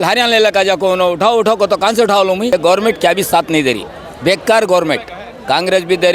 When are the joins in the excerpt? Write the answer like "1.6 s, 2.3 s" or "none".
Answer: 2.5 s